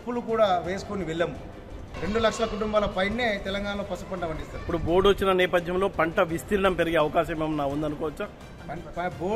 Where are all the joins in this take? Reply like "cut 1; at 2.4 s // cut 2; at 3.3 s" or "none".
cut 1; at 1.9 s